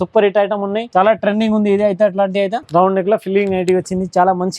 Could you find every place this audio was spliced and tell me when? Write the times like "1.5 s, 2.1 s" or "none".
0.8 s, 2.6 s